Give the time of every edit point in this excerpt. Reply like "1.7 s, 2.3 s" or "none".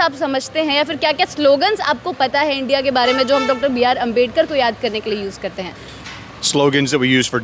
none